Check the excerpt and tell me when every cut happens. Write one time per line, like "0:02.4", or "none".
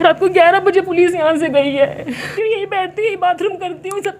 0:02.3